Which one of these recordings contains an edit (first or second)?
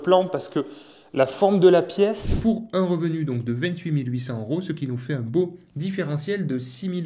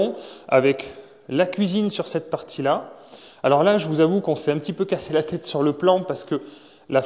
first